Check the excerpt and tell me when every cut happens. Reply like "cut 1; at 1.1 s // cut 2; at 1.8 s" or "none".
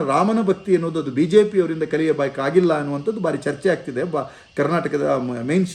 none